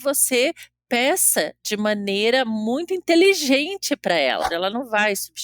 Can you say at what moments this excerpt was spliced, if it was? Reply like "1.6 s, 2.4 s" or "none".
4.5 s